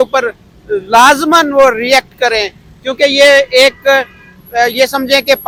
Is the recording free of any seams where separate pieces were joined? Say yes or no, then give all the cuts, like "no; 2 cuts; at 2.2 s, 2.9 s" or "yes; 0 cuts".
yes; 0 cuts